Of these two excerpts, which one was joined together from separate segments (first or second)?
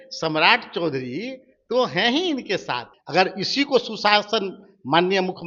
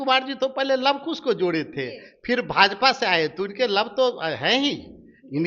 first